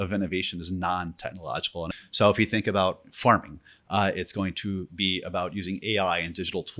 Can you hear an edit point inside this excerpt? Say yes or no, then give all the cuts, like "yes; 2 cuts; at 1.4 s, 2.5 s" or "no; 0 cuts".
yes; 1 cut; at 1.9 s